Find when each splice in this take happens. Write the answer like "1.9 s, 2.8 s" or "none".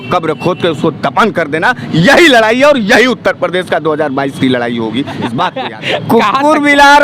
5.7 s